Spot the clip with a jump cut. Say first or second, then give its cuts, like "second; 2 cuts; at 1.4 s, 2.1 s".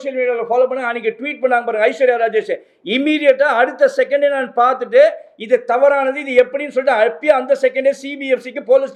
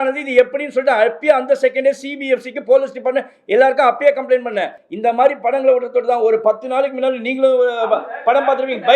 second; 1 cut; at 4.8 s